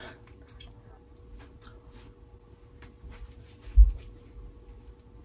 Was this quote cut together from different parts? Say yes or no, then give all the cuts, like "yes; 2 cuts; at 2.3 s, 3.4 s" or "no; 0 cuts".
no; 0 cuts